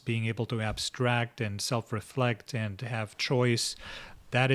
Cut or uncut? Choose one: uncut